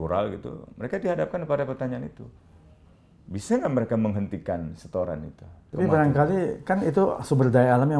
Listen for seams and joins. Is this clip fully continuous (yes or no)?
no